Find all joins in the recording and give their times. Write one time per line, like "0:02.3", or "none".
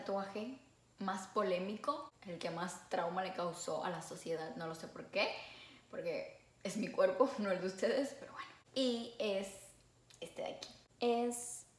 none

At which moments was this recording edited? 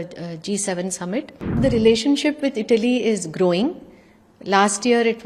0:01.6

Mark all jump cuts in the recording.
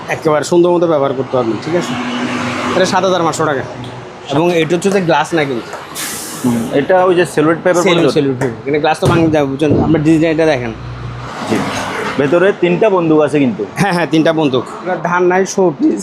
0:04.2
0:11.2
0:15.0

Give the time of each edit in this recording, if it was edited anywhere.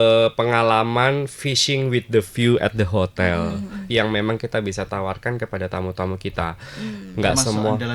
0:03.8

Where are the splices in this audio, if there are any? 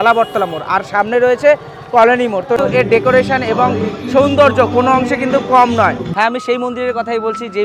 0:02.6
0:06.0

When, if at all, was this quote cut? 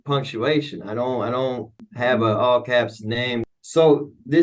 0:01.8
0:03.4

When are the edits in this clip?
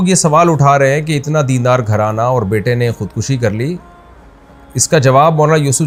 none

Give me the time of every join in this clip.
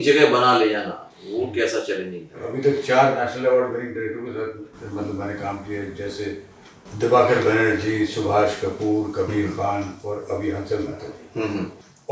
0:02.4

